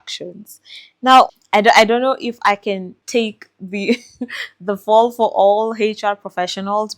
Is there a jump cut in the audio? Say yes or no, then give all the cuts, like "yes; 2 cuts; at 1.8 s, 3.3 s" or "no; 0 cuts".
no; 0 cuts